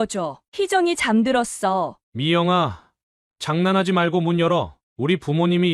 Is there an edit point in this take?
yes; 1 cut; at 2.0 s

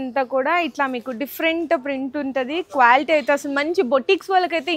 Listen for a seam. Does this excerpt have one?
no; 0 cuts

